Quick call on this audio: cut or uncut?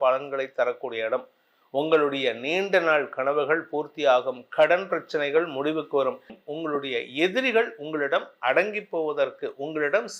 cut